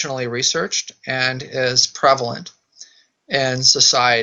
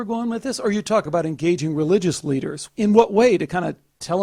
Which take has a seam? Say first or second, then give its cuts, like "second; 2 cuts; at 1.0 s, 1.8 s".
second; 2 cuts; at 1.1 s, 2.6 s